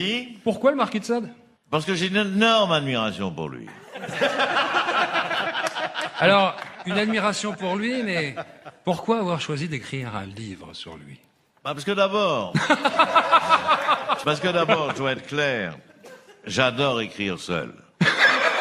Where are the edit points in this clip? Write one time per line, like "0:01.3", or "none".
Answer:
0:14.8